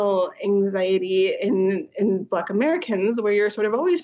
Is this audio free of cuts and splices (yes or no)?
yes